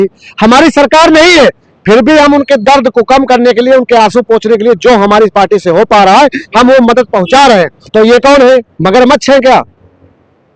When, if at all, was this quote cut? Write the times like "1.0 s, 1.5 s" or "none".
7.8 s